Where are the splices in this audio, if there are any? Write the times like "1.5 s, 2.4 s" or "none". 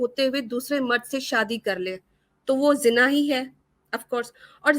none